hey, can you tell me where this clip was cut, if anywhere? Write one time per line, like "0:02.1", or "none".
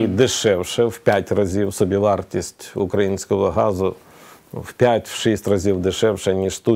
none

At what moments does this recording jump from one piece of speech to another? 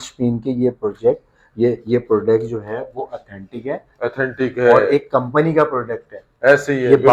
none

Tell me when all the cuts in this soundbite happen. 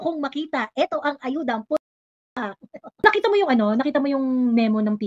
0:03.0

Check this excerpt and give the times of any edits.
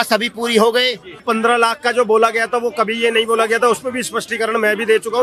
0:01.2

